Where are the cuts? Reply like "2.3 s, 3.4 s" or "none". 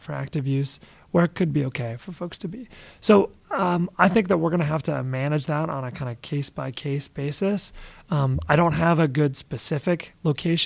none